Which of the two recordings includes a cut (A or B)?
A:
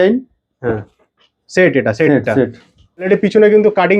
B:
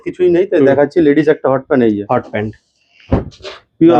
A